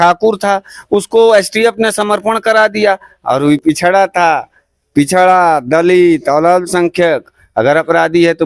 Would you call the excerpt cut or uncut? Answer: uncut